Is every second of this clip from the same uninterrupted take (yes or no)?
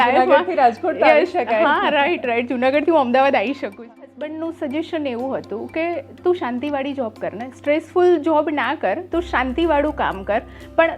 no